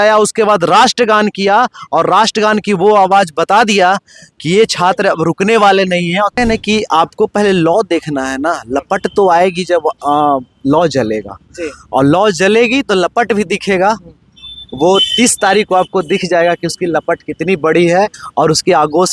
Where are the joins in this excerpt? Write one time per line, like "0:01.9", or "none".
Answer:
0:06.3